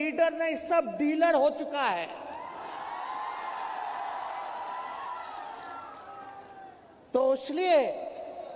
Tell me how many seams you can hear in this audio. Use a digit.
0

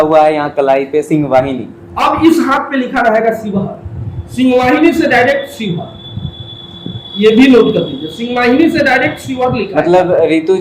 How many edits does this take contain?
0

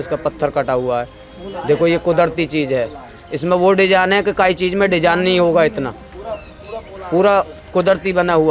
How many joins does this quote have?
0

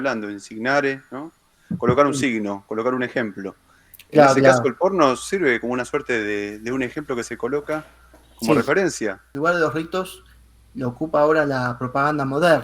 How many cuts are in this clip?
1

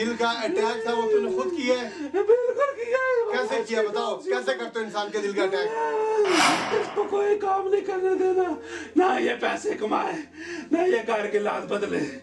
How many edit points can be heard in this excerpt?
1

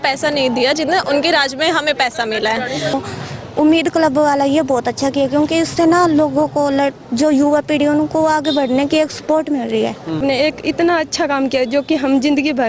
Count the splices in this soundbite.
2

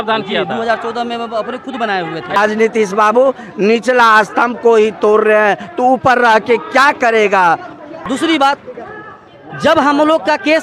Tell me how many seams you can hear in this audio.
2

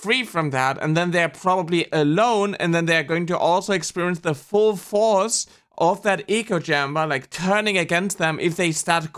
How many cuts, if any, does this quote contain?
0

